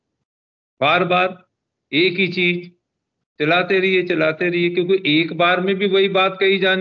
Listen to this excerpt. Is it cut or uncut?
uncut